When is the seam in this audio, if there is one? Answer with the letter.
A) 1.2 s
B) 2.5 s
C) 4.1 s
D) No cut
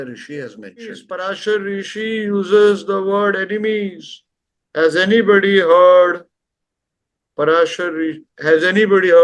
A